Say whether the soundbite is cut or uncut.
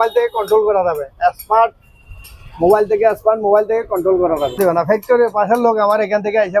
cut